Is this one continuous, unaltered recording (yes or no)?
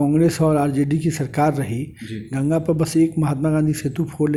yes